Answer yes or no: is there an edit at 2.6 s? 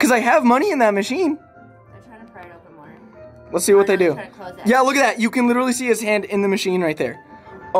no